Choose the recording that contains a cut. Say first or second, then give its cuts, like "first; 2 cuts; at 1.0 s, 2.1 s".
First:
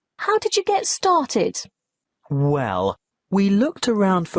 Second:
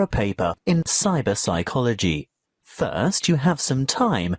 first; 1 cut; at 2.5 s